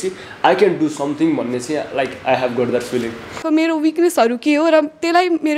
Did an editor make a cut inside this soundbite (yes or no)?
yes